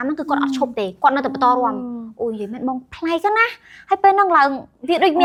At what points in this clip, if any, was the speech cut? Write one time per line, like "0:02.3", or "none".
none